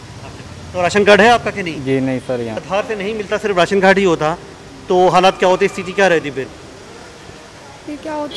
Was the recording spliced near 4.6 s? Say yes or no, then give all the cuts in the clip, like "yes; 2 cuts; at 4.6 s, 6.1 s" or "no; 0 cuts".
no; 1 cut; at 2.6 s